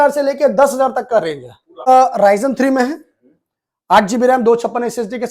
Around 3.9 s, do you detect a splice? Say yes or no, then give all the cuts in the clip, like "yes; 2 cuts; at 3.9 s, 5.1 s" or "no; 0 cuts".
no; 1 cut; at 1.9 s